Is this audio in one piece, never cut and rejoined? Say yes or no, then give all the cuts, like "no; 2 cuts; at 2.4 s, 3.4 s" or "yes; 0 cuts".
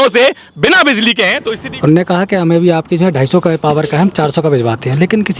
no; 1 cut; at 1.5 s